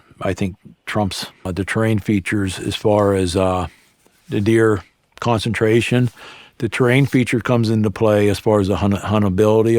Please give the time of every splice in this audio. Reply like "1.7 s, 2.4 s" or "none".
1.5 s